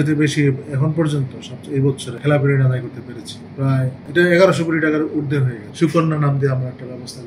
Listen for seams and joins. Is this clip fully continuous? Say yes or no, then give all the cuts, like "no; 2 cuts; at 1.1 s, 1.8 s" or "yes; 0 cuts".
no; 3 cuts; at 2.1 s, 4.0 s, 5.6 s